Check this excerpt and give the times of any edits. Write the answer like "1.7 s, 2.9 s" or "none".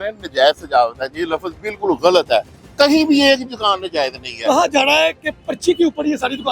2.6 s